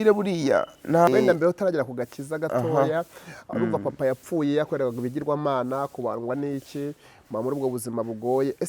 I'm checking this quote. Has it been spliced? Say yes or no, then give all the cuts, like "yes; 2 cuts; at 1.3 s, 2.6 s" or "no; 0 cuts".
yes; 1 cut; at 1.1 s